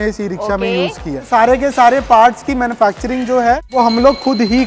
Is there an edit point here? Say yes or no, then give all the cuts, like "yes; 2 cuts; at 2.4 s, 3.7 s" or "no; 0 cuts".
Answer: yes; 2 cuts; at 1.2 s, 3.7 s